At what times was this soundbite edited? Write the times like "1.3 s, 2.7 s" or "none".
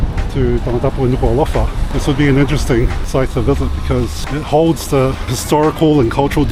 1.8 s, 3.0 s, 4.2 s, 5.4 s